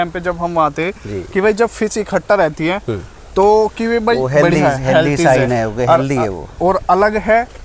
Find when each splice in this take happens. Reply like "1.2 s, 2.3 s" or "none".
none